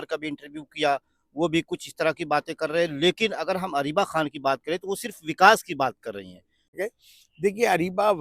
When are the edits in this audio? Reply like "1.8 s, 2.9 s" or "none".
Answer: 6.7 s